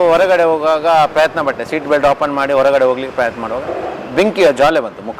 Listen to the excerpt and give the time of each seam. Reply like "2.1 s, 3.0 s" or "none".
none